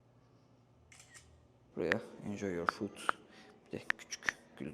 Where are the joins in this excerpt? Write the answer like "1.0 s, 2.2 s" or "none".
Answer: 1.5 s